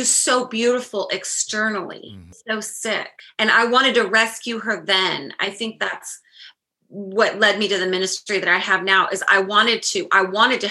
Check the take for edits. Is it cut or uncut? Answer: cut